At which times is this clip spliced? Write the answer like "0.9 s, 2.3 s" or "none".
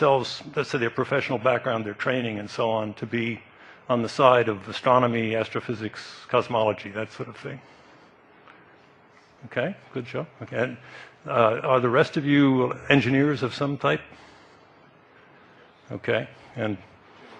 none